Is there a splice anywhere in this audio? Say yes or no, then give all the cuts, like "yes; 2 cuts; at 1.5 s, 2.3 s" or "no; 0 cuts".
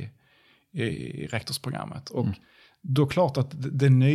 no; 0 cuts